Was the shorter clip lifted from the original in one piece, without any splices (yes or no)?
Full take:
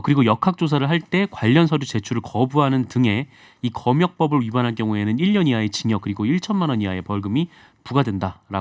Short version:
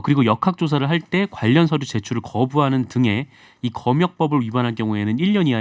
yes